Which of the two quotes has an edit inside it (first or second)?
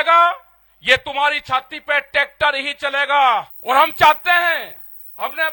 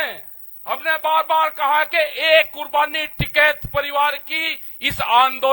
first